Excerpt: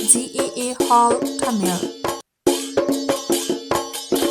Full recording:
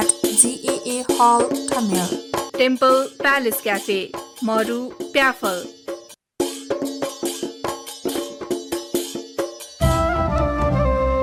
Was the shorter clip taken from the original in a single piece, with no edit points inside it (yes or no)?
no